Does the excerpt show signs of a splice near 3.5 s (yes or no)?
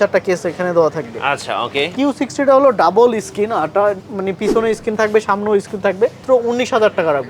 no